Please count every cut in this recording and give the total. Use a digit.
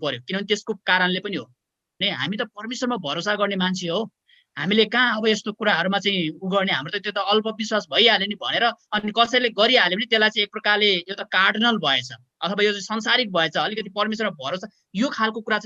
1